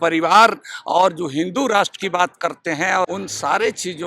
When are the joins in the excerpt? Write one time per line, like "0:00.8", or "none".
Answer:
0:03.1